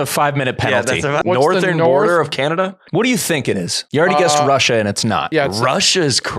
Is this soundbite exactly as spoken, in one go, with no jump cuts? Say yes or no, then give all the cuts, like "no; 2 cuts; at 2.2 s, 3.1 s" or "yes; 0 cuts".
no; 4 cuts; at 1.2 s, 2.8 s, 3.8 s, 5.2 s